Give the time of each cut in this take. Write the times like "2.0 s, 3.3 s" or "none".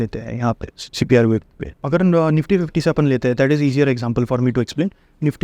1.8 s